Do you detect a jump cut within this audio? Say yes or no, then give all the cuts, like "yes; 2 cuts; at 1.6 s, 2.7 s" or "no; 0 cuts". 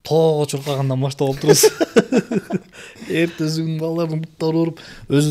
no; 0 cuts